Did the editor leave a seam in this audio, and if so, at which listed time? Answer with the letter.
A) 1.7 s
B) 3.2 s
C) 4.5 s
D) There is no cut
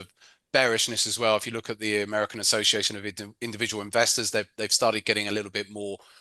D